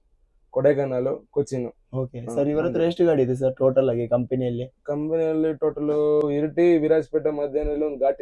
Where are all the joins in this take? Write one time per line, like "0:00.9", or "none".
0:06.2